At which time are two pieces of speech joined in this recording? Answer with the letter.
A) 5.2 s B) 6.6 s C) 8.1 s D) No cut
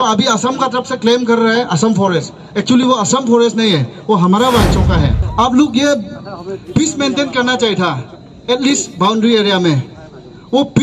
A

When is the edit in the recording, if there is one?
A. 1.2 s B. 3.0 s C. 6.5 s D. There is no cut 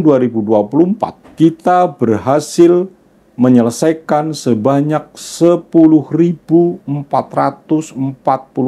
A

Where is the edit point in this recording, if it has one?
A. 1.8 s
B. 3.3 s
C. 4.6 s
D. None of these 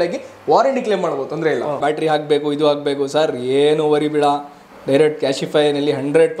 A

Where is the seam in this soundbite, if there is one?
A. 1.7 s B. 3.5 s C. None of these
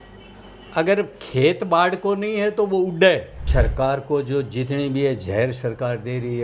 B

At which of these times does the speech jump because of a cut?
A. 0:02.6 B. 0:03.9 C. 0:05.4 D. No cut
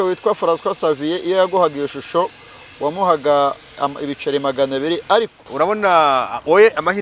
C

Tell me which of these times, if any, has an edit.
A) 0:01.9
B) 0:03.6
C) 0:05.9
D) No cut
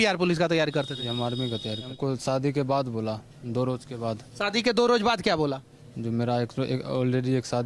A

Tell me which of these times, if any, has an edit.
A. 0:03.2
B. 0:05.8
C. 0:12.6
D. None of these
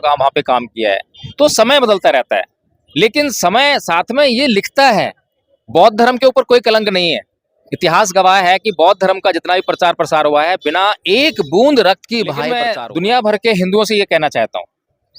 C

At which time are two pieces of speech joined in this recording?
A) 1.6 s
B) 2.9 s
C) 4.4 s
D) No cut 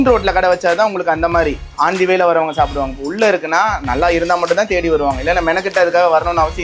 A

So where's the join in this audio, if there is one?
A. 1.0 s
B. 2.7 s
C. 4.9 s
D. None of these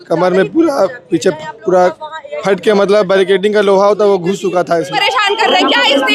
C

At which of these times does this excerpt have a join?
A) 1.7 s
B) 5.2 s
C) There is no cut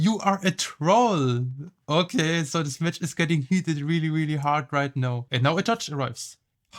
B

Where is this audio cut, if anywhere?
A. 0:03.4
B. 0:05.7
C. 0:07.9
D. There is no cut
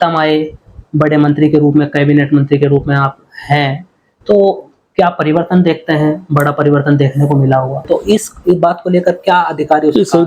C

